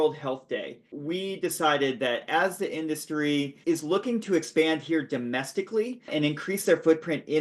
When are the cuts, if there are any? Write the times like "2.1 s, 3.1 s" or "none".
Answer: 1.0 s, 3.6 s, 6.1 s